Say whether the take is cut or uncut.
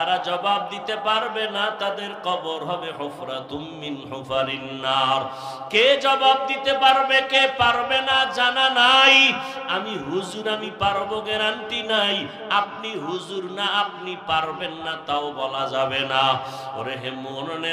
uncut